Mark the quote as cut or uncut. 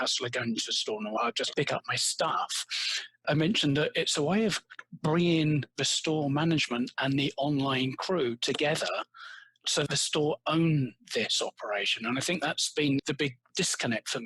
cut